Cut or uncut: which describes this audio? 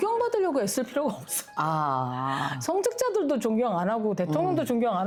uncut